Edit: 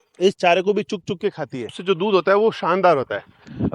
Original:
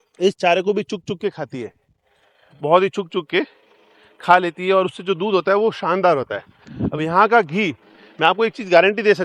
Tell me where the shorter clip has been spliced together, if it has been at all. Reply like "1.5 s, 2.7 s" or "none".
1.8 s